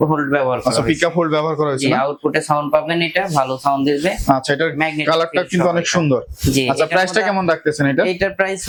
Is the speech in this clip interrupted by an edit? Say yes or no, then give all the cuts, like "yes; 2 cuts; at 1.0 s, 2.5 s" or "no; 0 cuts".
no; 0 cuts